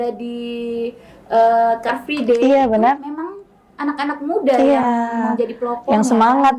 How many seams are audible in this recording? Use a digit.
0